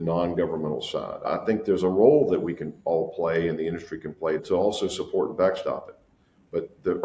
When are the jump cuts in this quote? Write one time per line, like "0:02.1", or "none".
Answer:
0:04.4